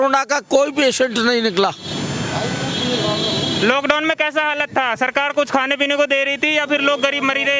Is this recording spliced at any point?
no; 0 cuts

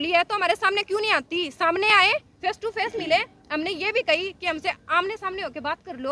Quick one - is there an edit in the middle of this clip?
no; 0 cuts

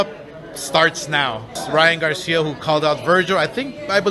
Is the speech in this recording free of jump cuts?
yes; 0 cuts

